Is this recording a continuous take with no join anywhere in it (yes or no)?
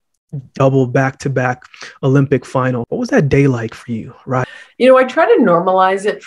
no